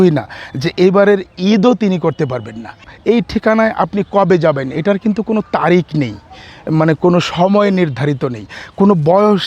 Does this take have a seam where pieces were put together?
yes; 1 cut; at 2.9 s

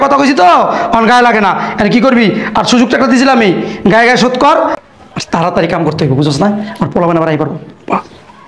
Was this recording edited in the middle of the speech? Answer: yes; 1 cut; at 4.8 s

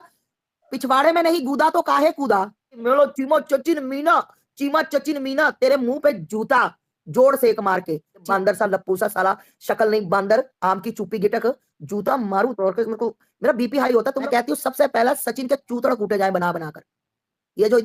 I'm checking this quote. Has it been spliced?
yes; 3 cuts; at 2.8 s, 8.3 s, 14.2 s

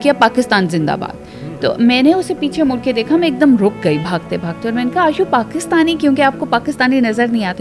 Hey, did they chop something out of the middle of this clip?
no; 0 cuts

